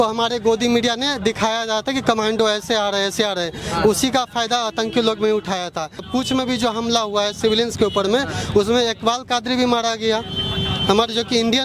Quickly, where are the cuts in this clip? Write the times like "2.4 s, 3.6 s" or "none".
6.0 s

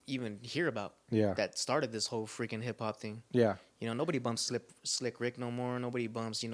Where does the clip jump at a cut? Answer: none

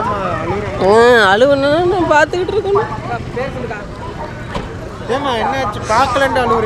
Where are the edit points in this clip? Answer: none

